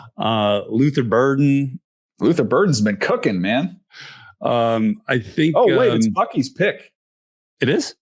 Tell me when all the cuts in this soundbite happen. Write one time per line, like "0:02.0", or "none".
0:03.9